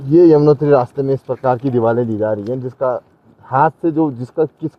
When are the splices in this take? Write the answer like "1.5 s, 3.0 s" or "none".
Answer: none